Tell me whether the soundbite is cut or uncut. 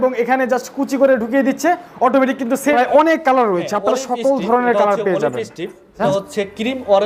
cut